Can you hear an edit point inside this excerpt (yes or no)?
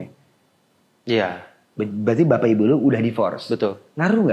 no